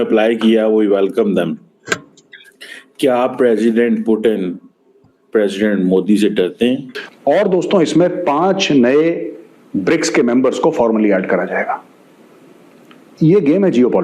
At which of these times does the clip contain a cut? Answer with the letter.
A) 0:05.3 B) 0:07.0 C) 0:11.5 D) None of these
B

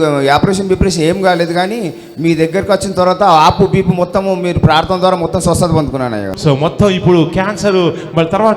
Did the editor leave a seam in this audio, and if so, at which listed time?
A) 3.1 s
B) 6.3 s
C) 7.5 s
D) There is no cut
B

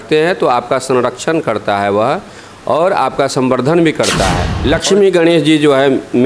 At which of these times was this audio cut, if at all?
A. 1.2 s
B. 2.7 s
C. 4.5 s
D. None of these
C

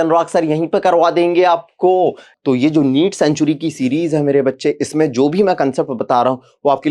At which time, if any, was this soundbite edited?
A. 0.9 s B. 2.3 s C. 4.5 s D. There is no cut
B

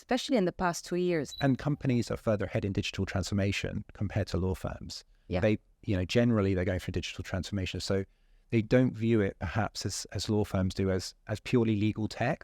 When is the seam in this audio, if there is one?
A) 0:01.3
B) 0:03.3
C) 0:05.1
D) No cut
A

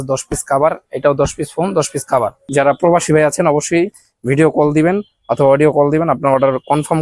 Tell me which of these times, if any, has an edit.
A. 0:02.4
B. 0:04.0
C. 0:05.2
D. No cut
A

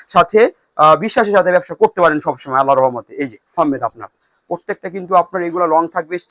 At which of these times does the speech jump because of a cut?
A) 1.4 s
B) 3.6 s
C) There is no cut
B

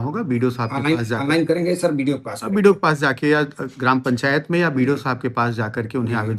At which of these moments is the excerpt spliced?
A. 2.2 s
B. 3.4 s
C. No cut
C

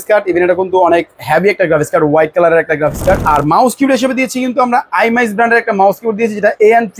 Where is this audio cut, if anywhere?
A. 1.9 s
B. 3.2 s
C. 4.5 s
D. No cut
B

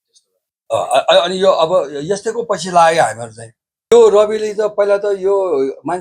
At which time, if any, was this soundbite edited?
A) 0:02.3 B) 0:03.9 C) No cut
B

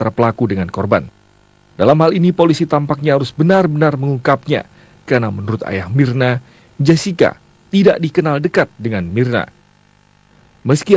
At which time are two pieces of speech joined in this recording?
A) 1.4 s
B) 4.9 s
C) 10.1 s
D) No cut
D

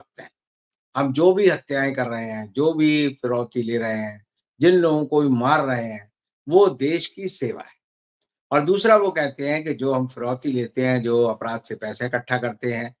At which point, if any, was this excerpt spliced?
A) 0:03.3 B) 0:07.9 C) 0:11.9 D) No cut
D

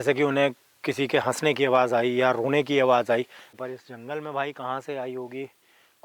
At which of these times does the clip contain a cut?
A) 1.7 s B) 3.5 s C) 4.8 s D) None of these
B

